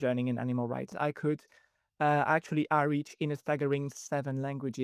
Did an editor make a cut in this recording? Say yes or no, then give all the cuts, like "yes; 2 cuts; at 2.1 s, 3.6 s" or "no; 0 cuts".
yes; 1 cut; at 0.9 s